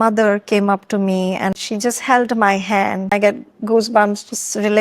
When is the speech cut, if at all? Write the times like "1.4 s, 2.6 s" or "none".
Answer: 1.6 s, 3.1 s